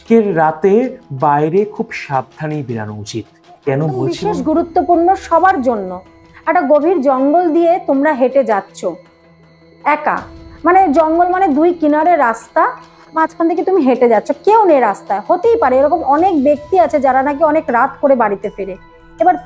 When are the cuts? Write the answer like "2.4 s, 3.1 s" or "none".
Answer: 4.2 s